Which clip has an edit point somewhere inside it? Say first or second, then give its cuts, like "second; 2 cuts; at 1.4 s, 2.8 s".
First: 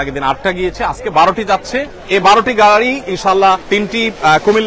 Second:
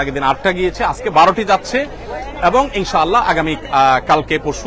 first; 2 cuts; at 1.9 s, 3.6 s